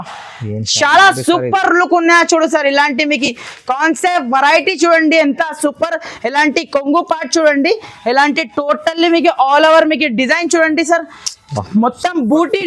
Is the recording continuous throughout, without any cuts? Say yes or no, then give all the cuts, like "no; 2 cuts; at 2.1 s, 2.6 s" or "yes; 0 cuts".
yes; 0 cuts